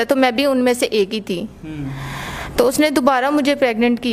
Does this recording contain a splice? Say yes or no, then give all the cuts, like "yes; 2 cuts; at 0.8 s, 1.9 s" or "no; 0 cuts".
no; 0 cuts